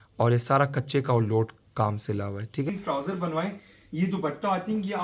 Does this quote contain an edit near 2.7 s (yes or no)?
yes